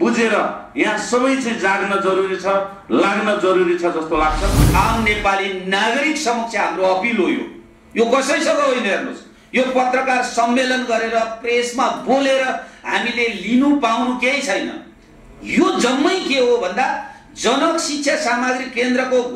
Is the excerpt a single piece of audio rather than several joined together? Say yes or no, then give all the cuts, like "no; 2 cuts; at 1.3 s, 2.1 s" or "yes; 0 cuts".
no; 1 cut; at 4.5 s